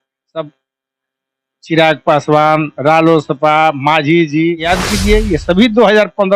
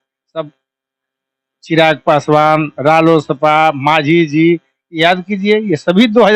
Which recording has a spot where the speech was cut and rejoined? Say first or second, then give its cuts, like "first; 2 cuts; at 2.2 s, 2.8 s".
first; 1 cut; at 4.6 s